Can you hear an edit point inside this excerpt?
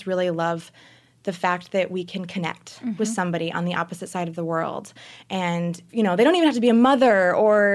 yes; 1 cut; at 5.8 s

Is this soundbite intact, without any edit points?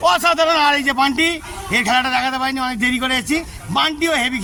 yes; 0 cuts

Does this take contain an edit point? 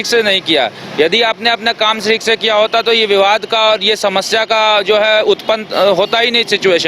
no; 0 cuts

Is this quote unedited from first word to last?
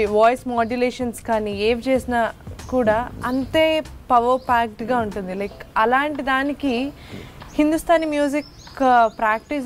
yes; 0 cuts

